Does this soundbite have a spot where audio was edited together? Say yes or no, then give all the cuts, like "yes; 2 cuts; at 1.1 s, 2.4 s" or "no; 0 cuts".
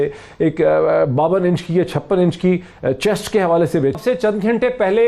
yes; 1 cut; at 3.9 s